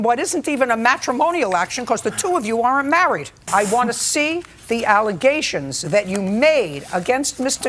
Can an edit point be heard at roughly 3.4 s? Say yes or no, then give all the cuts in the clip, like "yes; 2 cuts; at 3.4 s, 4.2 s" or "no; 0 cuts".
yes; 1 cut; at 3.4 s